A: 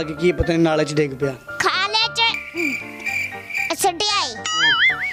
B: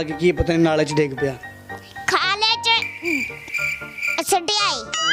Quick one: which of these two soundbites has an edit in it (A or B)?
A